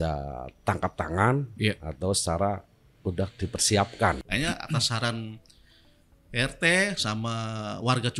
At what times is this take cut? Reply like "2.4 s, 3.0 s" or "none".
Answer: 4.2 s